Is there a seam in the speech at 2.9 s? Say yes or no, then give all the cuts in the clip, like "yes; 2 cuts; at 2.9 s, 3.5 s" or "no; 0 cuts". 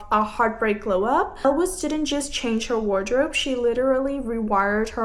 no; 1 cut; at 1.3 s